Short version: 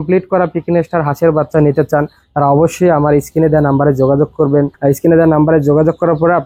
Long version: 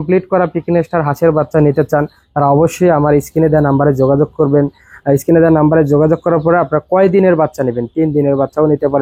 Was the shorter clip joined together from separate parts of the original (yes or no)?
yes